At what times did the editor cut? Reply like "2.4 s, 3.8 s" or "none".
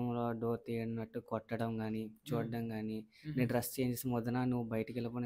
none